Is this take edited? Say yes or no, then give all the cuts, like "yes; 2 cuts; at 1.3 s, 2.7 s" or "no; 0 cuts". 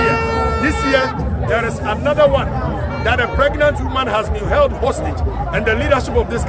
no; 0 cuts